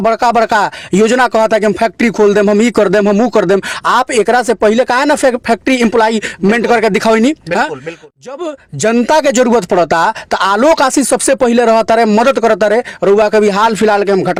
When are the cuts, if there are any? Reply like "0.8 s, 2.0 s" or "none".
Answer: none